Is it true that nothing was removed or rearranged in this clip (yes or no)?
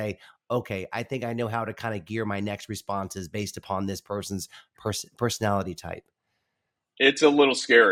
yes